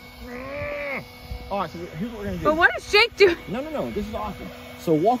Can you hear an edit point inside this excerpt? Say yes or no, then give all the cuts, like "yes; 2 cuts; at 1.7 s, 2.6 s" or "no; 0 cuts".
no; 0 cuts